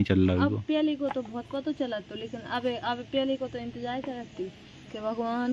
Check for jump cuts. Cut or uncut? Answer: uncut